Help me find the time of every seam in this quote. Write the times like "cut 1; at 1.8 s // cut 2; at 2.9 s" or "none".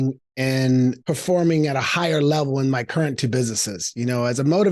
cut 1; at 1.0 s

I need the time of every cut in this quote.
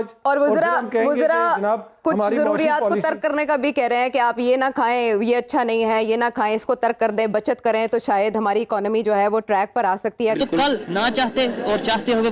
cut 1; at 10.4 s

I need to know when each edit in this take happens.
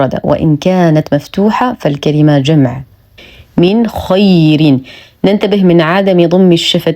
cut 1; at 3.1 s

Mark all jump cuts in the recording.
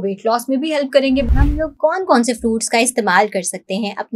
cut 1; at 1.3 s

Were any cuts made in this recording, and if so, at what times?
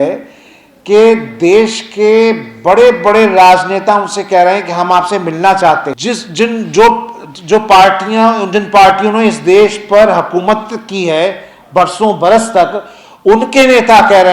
cut 1; at 5.9 s

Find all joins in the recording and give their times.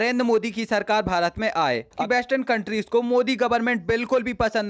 cut 1; at 2.0 s

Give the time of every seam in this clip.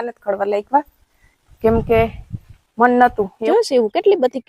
cut 1; at 3.4 s

